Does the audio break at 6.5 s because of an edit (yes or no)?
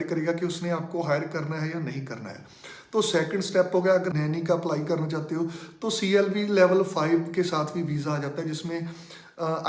no